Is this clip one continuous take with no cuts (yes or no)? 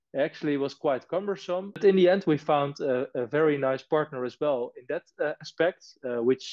no